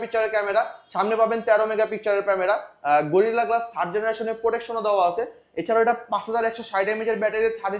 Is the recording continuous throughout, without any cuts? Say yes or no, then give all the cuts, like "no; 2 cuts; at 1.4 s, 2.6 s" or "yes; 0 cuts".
yes; 0 cuts